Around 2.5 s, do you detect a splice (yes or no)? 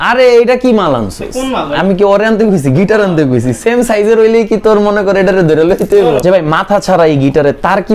no